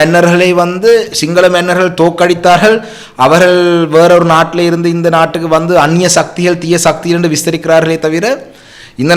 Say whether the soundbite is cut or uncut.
uncut